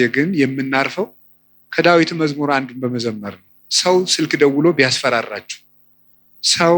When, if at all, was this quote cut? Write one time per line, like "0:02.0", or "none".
0:03.6